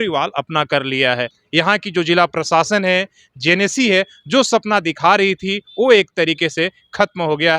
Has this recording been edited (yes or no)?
yes